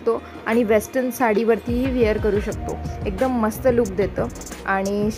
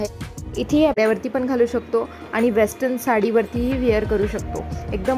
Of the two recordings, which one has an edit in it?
second; 1 cut; at 0.9 s

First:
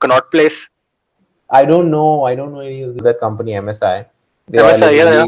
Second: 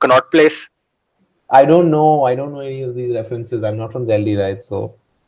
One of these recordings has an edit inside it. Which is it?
first; 1 cut; at 3.0 s

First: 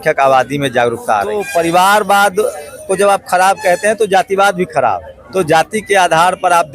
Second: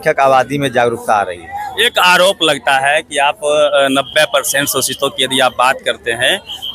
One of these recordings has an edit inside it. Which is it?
first; 2 cuts; at 1.4 s, 5.1 s

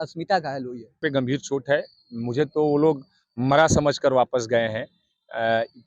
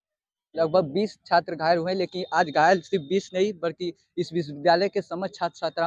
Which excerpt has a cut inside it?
first; 1 cut; at 1.0 s

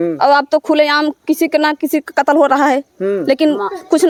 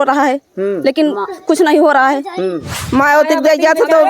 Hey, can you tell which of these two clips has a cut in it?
second; 1 cut; at 2.7 s

